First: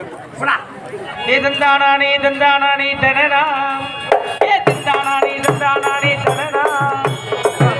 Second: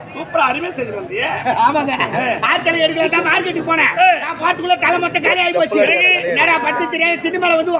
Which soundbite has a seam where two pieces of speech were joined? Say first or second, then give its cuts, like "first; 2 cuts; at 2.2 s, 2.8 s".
first; 1 cut; at 1.1 s